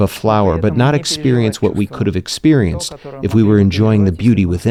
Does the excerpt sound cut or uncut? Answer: uncut